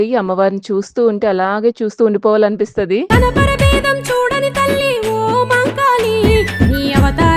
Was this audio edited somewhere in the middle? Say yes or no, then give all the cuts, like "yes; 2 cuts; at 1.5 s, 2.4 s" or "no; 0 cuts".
no; 0 cuts